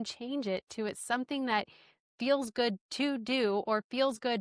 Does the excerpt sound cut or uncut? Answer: uncut